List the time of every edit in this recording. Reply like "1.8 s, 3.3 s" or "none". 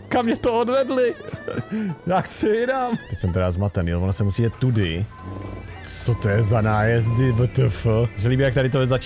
3.1 s, 8.2 s